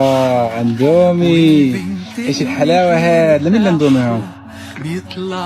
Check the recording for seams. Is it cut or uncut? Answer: uncut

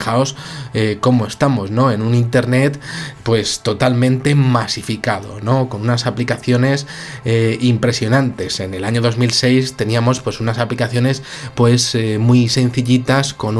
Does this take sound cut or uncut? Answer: uncut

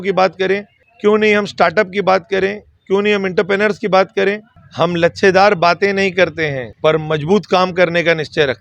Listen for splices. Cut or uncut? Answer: cut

